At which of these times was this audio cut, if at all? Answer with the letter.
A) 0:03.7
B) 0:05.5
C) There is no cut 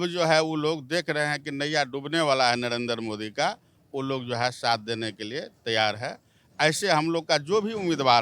C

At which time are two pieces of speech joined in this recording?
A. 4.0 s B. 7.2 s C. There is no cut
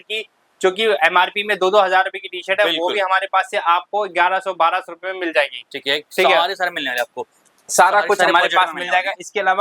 C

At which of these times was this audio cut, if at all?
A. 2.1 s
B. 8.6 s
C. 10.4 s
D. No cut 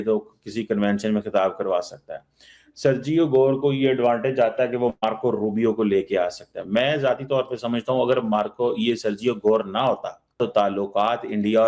C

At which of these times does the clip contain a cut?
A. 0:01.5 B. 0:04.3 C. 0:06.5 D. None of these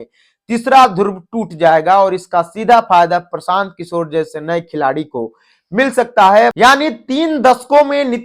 C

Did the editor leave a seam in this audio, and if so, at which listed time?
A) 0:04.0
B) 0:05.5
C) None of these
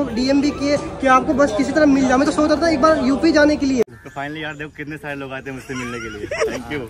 A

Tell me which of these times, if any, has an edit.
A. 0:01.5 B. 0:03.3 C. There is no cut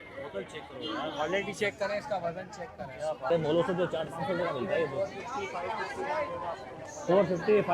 B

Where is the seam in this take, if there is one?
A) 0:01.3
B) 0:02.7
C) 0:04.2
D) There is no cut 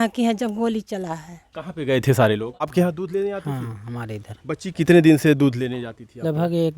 B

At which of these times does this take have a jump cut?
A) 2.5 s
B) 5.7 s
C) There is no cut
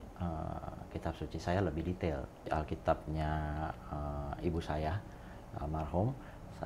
A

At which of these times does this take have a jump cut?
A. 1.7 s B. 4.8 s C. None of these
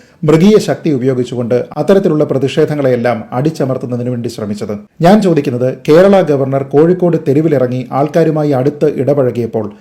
B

